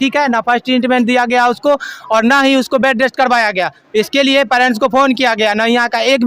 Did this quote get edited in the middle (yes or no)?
no